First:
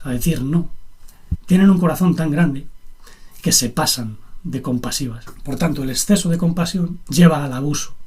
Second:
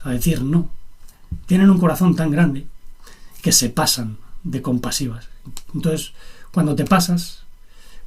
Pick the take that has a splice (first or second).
first